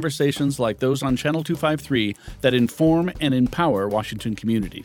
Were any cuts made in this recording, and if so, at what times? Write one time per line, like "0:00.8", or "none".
none